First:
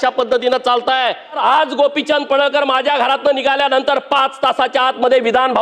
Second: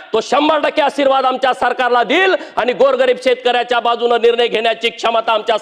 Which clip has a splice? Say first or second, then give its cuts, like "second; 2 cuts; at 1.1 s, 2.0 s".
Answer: first; 1 cut; at 1.4 s